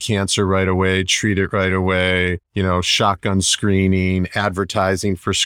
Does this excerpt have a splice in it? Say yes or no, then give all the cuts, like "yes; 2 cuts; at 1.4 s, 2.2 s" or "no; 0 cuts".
yes; 1 cut; at 2.4 s